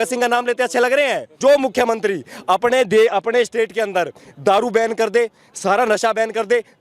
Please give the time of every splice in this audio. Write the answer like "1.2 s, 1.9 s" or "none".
1.3 s